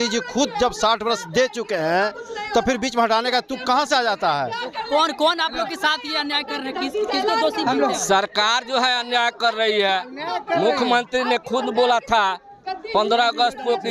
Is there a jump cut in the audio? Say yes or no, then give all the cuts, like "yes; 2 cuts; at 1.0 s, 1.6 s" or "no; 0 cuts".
no; 0 cuts